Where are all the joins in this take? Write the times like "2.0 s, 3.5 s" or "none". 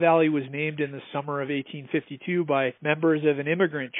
2.8 s